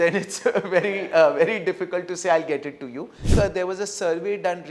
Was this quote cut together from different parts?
yes; 1 cut; at 3.2 s

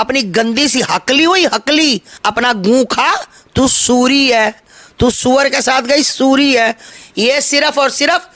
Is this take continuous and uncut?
no; 2 cuts; at 2.1 s, 6.9 s

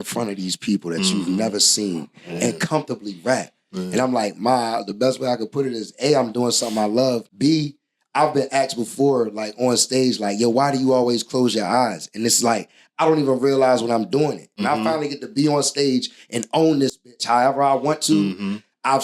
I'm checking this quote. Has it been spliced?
yes; 2 cuts; at 7.3 s, 14.6 s

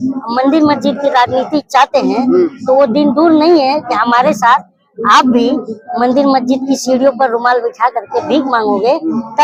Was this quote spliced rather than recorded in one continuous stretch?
no; 0 cuts

